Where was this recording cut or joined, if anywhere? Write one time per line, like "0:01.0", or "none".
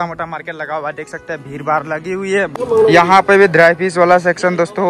0:02.5